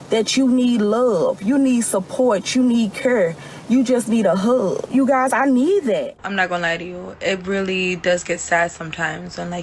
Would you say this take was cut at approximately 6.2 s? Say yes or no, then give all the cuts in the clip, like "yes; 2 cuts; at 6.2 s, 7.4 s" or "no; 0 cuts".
yes; 2 cuts; at 4.9 s, 6.2 s